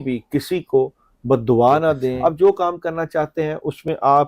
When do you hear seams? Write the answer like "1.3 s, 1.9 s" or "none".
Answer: 2.2 s